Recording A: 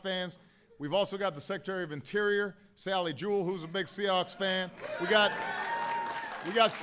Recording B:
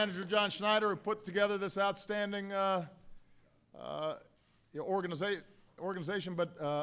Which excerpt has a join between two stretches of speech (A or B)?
B